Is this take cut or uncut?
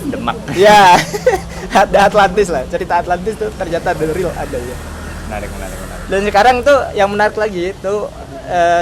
uncut